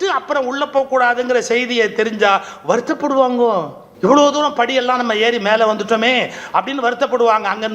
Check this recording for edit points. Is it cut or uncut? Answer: cut